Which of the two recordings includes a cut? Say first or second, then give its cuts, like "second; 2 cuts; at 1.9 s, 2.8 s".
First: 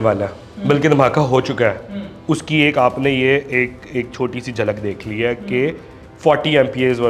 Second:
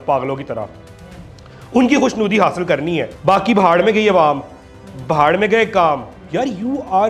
second; 2 cuts; at 3.1 s, 6.2 s